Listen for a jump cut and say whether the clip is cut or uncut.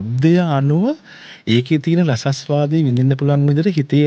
uncut